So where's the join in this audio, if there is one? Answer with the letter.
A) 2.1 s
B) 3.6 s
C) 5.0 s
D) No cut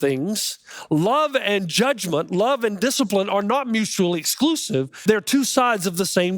C